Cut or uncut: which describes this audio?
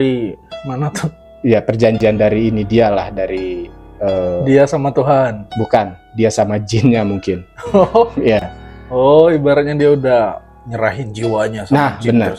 uncut